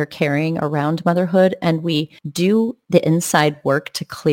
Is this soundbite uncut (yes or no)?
no